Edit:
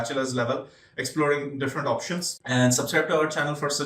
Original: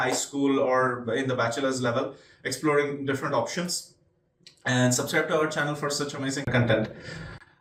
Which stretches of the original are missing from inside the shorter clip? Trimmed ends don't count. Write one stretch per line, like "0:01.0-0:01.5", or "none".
0:03.8-0:04.5